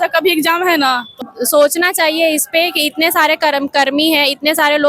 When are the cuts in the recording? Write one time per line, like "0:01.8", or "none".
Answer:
0:01.2